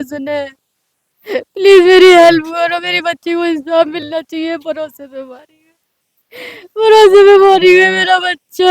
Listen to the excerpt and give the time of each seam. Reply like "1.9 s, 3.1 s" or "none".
none